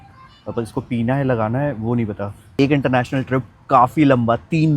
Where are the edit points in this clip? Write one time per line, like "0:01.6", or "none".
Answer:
0:02.4